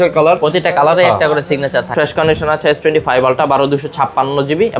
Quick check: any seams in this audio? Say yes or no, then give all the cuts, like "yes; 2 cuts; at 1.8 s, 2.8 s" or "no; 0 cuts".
yes; 1 cut; at 1.9 s